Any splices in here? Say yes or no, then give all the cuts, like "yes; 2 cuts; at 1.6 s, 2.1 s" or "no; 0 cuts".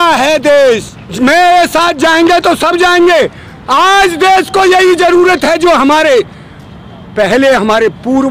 yes; 1 cut; at 1.0 s